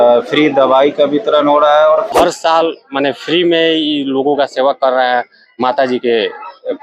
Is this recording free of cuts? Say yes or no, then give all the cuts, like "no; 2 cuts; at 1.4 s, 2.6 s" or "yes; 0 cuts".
no; 1 cut; at 2.1 s